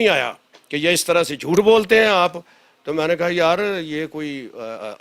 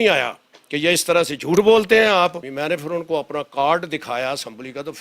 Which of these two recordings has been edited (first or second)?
second